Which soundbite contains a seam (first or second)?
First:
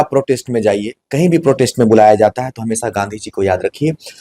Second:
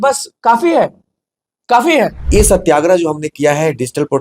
second